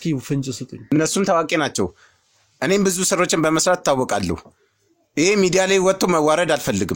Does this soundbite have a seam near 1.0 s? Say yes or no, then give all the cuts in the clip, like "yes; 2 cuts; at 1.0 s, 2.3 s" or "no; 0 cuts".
yes; 1 cut; at 1.0 s